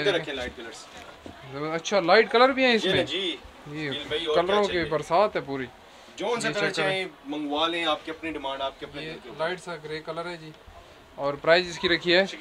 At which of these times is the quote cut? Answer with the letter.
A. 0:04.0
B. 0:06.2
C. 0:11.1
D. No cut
D